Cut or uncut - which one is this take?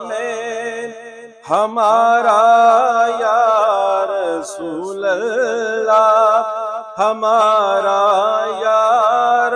uncut